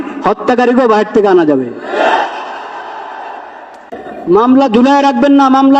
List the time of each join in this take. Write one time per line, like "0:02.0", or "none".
0:04.1